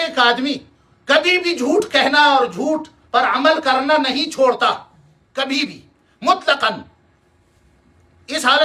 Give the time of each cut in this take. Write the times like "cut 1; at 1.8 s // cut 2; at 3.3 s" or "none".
none